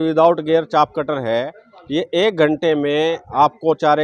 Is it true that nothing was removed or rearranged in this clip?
yes; 0 cuts

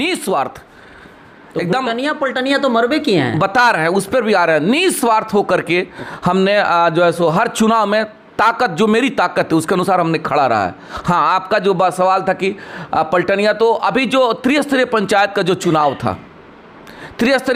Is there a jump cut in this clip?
no; 0 cuts

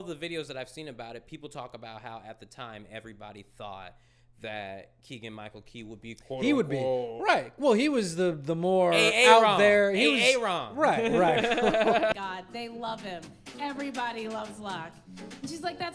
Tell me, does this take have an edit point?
yes; 1 cut; at 12.1 s

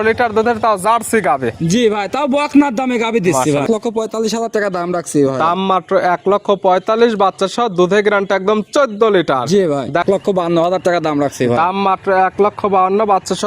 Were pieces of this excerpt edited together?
yes; 2 cuts; at 3.6 s, 10.0 s

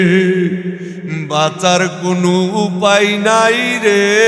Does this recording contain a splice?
no; 0 cuts

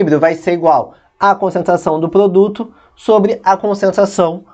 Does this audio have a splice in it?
no; 0 cuts

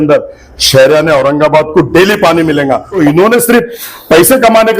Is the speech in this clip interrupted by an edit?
yes; 1 cut; at 3.0 s

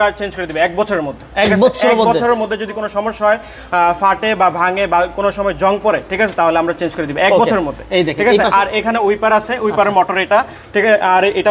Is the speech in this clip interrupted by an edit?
no; 0 cuts

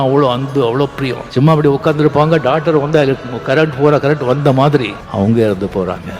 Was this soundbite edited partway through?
yes; 2 cuts; at 1.2 s, 5.0 s

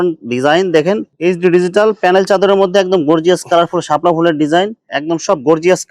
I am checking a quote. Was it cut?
yes; 1 cut; at 4.8 s

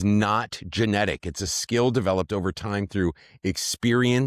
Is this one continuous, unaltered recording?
yes; 0 cuts

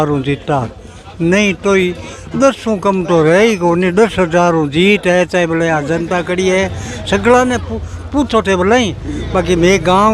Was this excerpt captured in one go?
yes; 0 cuts

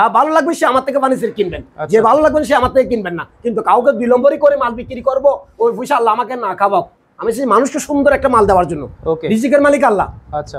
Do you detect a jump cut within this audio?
no; 0 cuts

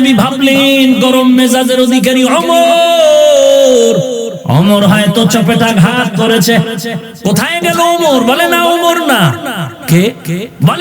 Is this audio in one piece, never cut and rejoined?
no; 2 cuts; at 4.3 s, 7.0 s

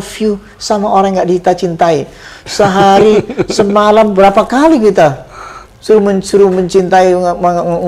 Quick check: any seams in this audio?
no; 0 cuts

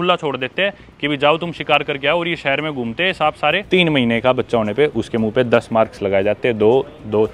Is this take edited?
yes; 1 cut; at 3.6 s

